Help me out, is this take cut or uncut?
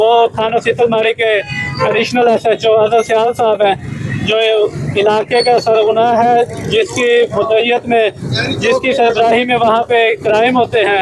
uncut